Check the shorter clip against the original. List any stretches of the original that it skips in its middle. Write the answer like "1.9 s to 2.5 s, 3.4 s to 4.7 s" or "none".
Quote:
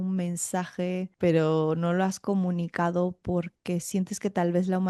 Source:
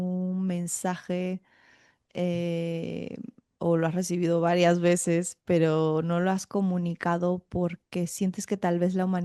1.4 s to 5.4 s